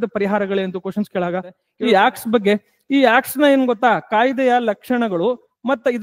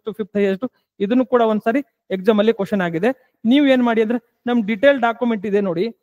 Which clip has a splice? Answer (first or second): first